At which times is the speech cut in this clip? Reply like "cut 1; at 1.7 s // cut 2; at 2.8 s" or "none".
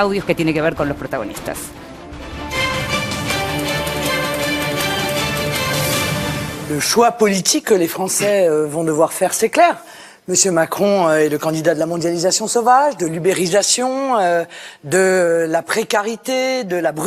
cut 1; at 9.6 s